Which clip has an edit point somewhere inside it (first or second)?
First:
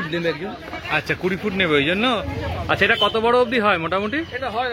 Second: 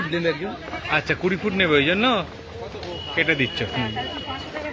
first